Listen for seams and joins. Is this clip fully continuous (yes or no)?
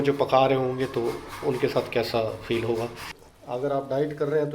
no